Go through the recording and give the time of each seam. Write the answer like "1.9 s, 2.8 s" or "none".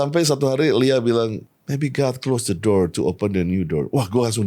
1.5 s